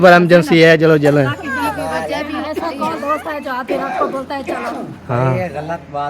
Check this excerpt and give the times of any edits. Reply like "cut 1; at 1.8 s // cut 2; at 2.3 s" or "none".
cut 1; at 3.0 s